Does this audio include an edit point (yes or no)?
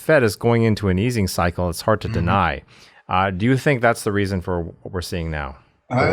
no